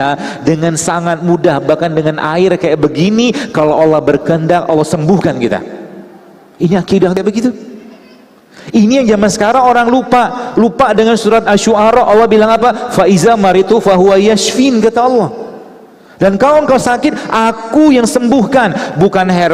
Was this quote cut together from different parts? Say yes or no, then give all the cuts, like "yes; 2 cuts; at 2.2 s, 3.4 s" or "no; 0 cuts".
no; 0 cuts